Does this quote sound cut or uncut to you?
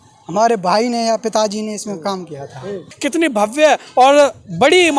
cut